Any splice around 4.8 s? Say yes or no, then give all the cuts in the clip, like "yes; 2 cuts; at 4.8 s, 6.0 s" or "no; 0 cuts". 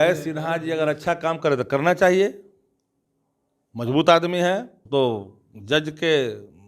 yes; 1 cut; at 4.8 s